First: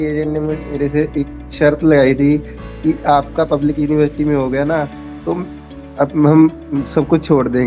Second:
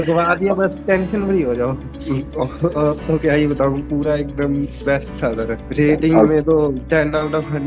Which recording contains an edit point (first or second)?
second